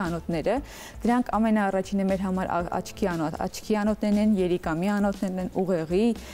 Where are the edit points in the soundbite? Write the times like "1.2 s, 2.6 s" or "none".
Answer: none

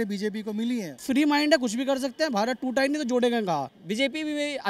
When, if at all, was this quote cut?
1.0 s, 3.8 s

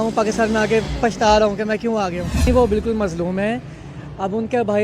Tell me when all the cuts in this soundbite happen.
2.5 s

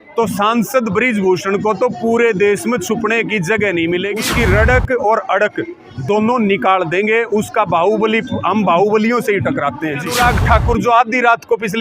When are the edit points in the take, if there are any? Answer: 4.3 s, 10.1 s

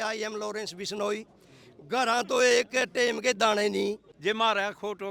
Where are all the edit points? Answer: 4.1 s

